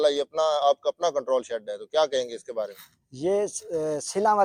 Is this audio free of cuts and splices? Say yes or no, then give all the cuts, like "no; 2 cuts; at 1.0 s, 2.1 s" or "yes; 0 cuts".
yes; 0 cuts